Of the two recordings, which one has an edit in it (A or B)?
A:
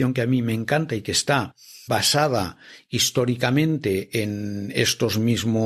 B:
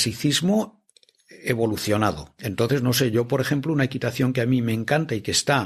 B